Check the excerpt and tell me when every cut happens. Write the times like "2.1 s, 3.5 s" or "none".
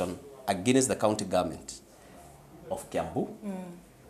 none